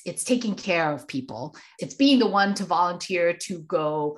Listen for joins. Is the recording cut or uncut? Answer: uncut